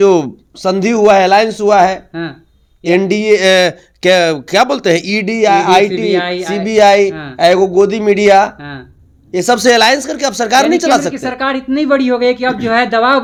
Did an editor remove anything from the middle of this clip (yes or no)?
no